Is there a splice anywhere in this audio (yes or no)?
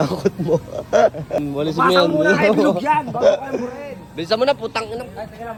no